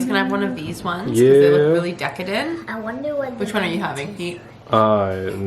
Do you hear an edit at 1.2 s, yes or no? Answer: no